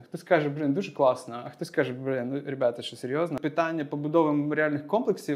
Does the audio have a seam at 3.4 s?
yes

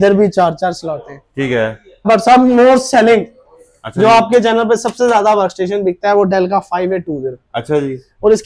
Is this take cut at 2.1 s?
yes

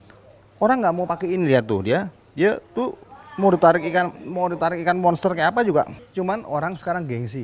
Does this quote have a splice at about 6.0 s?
yes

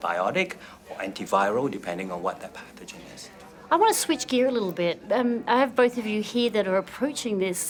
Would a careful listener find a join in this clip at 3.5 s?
no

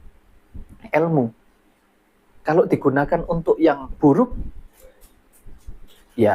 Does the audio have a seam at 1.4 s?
no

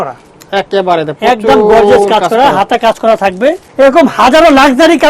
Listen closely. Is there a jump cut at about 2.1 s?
no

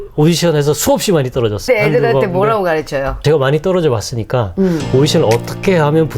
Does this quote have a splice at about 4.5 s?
no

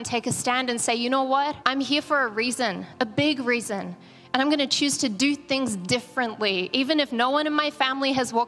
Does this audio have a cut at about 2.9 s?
no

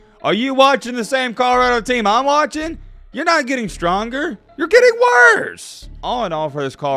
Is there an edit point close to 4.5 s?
no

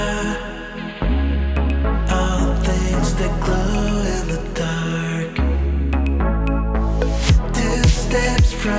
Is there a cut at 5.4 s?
no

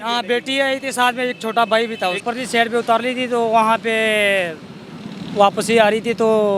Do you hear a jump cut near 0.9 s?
no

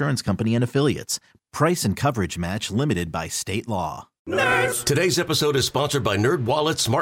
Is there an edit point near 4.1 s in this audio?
yes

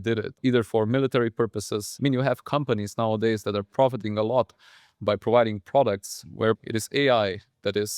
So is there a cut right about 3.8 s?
no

